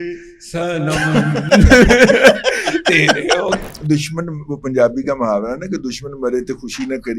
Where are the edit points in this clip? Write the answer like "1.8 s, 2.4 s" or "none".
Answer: 3.7 s